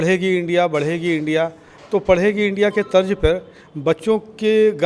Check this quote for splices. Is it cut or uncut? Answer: uncut